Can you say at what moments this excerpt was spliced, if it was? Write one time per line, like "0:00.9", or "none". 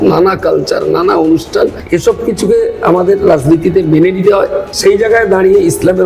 0:01.8
0:04.7